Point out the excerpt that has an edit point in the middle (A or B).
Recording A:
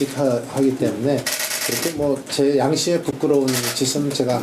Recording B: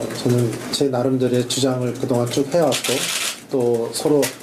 A